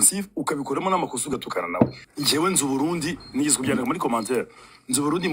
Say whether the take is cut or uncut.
cut